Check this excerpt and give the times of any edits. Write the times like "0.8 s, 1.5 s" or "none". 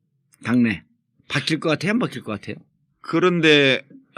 1.3 s